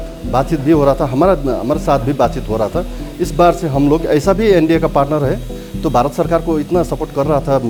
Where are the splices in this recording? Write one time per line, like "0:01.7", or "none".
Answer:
none